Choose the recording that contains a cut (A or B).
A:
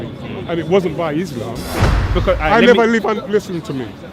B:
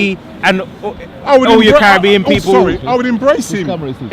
A